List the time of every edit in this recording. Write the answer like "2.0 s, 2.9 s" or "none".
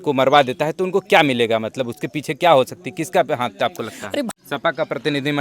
4.3 s